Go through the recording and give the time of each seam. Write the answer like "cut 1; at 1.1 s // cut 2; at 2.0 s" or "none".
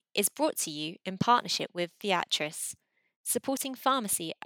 none